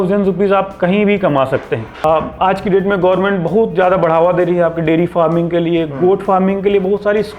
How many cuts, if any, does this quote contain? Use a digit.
1